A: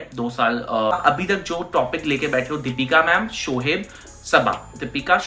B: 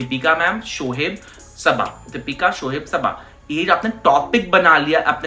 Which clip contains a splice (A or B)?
A